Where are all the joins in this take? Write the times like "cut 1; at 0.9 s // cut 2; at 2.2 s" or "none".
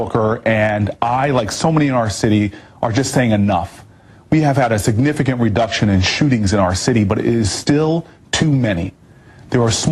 cut 1; at 3.8 s